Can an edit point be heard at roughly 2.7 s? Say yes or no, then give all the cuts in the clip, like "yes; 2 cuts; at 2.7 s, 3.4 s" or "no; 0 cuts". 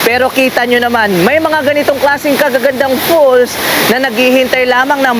no; 0 cuts